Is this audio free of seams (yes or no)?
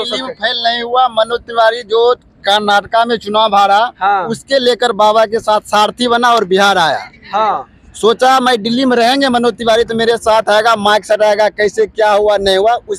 yes